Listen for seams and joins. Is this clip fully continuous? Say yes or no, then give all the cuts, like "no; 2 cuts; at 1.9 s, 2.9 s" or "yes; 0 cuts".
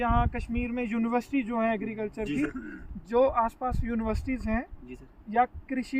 no; 1 cut; at 2.7 s